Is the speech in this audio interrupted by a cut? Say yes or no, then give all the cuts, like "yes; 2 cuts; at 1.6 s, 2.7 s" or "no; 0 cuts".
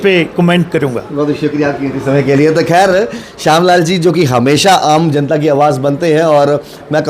no; 0 cuts